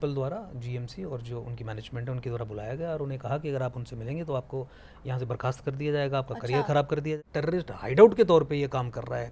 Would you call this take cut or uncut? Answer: cut